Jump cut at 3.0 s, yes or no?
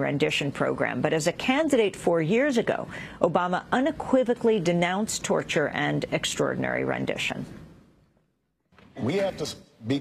no